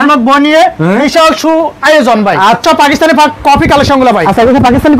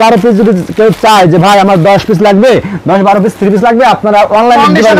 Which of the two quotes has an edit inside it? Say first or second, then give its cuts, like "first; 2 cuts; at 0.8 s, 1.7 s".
first; 1 cut; at 2.6 s